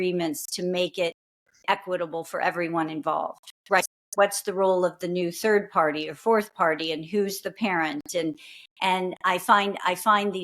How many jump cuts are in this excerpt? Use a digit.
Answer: 1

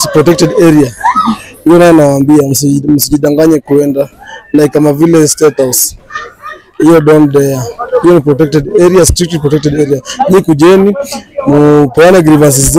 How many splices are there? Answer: 0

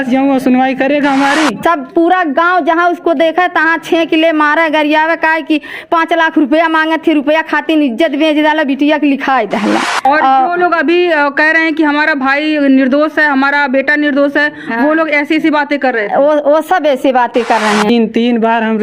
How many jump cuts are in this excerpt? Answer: 3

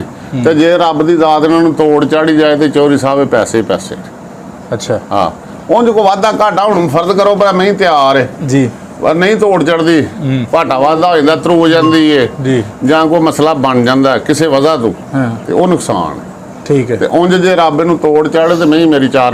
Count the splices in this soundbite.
0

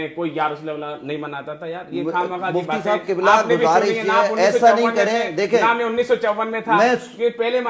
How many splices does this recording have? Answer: 0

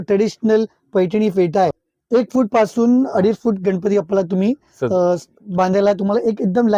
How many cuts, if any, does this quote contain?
1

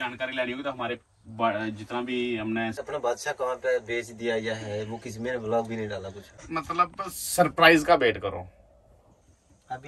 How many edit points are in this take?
2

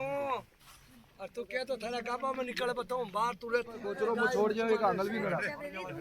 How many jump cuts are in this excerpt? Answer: 1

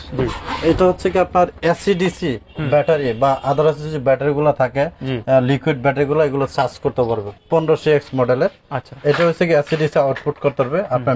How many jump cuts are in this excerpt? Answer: 1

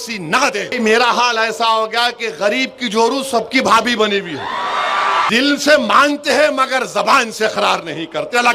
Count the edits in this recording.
2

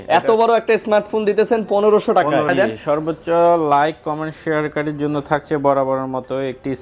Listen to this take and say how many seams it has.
1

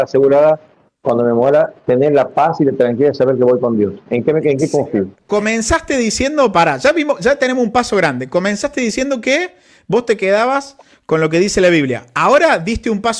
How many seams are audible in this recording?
1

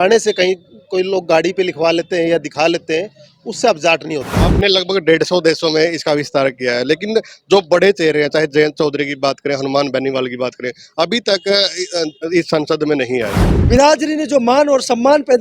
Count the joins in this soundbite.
2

